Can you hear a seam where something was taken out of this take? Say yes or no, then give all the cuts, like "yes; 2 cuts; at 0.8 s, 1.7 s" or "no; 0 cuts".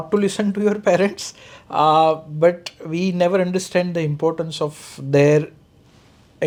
no; 0 cuts